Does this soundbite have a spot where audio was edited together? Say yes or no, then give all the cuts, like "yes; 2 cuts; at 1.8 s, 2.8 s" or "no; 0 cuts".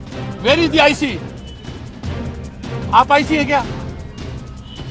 yes; 2 cuts; at 1.2 s, 2.8 s